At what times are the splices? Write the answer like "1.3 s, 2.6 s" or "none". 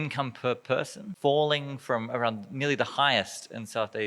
1.0 s

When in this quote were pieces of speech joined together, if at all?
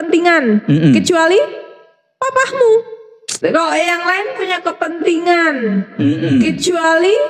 none

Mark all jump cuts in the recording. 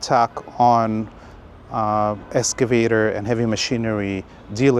none

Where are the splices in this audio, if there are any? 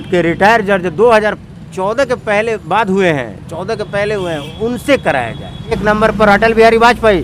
5.8 s

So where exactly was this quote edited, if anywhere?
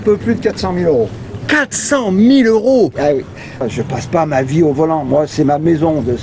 3.6 s

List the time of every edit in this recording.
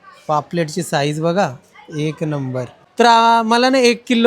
2.8 s

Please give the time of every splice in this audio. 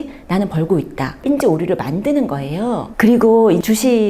1.2 s

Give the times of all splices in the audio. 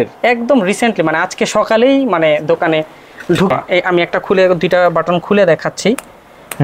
3.5 s

